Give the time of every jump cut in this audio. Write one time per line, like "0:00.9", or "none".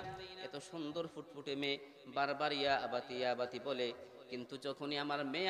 none

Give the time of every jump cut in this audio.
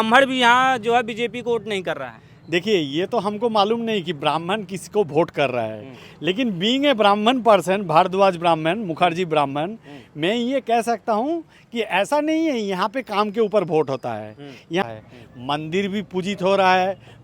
0:14.8

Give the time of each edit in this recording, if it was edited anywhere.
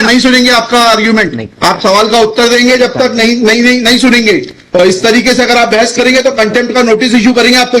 0:01.1

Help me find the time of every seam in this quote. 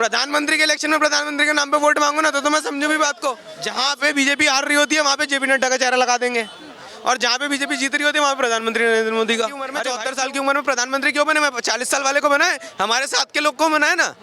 0:03.5
0:09.8

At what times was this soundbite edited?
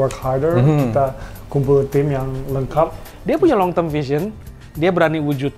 0:03.1

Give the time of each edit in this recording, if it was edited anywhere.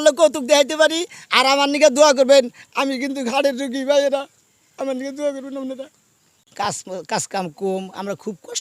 0:06.4

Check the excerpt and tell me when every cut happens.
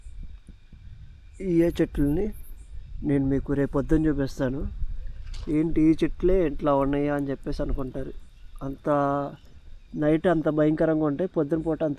none

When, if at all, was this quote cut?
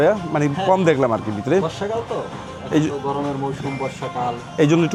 none

